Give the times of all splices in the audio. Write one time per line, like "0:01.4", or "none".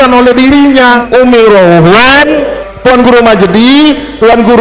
0:01.0
0:02.6